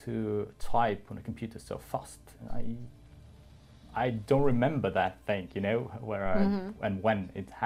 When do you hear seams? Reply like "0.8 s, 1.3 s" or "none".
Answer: none